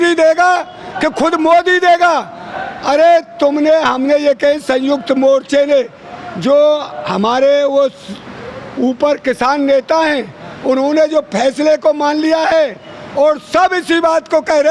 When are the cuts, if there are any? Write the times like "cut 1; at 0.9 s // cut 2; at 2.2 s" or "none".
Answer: none